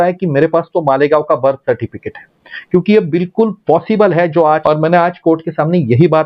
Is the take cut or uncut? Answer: cut